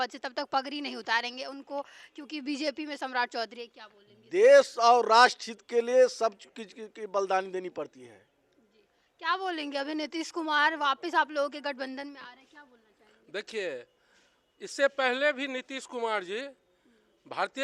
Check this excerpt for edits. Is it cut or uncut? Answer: uncut